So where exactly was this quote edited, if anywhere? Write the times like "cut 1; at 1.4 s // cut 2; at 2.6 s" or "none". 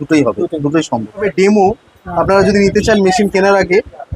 cut 1; at 1.3 s